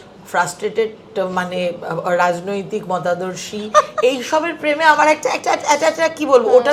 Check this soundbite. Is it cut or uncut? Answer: uncut